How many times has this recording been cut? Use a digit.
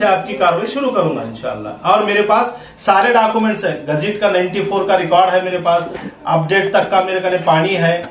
0